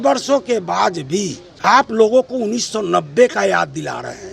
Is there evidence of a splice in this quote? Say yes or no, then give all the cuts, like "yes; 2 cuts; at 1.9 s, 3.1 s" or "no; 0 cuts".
yes; 1 cut; at 1.9 s